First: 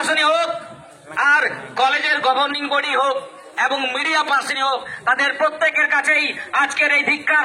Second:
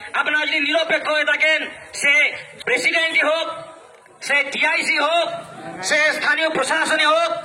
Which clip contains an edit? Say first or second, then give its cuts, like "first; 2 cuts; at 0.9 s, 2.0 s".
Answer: second; 1 cut; at 2.4 s